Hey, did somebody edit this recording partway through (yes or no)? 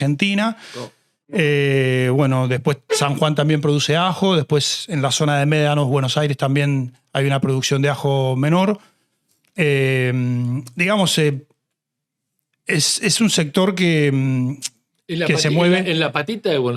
no